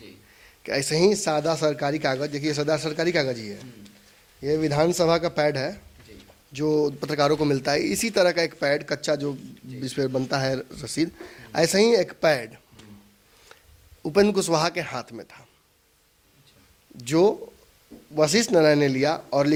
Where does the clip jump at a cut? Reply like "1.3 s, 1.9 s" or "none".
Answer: none